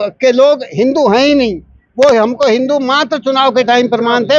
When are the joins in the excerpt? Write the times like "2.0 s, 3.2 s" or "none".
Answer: none